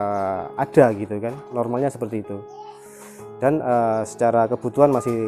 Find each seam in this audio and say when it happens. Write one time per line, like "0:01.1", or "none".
0:01.5